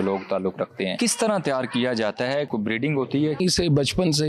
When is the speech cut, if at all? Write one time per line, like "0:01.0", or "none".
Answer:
0:00.9
0:02.5
0:03.4